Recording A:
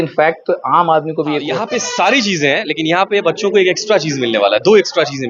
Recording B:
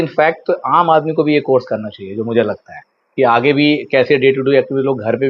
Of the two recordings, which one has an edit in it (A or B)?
A